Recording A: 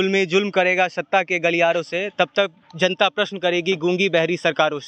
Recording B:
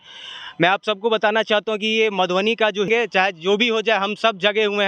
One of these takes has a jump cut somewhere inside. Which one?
B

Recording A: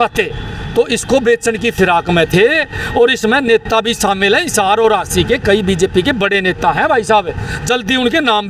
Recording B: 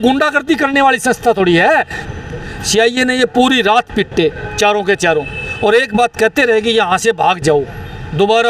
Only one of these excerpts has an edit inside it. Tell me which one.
B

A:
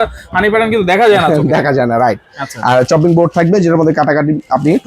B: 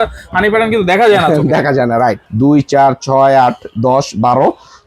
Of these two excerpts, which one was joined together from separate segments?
B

